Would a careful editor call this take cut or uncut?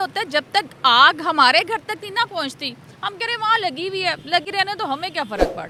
uncut